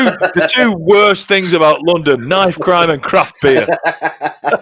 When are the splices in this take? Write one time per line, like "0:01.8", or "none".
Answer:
none